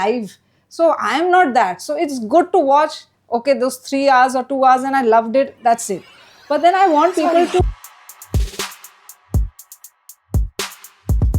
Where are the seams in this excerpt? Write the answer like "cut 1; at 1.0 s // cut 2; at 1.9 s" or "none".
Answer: cut 1; at 7.6 s